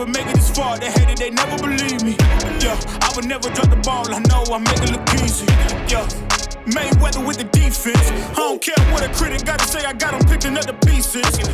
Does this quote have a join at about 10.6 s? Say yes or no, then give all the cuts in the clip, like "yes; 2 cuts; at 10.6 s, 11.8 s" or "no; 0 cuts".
no; 0 cuts